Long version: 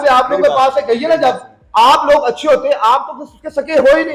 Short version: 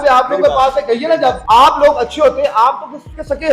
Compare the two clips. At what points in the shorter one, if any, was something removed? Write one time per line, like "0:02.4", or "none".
0:01.4